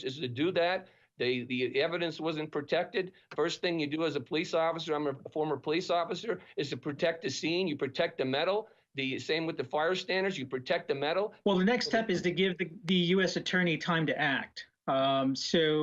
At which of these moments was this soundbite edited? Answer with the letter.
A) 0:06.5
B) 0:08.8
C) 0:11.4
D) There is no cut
C